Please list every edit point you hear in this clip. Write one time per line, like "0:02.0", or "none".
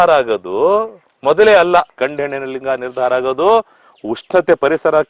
0:02.0